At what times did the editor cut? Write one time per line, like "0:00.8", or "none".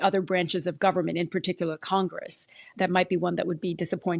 0:02.7